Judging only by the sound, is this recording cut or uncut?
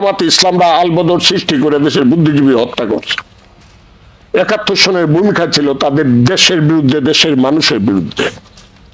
uncut